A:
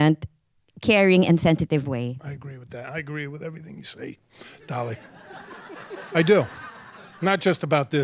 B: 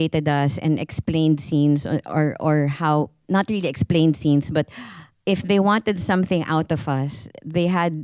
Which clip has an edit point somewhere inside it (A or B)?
A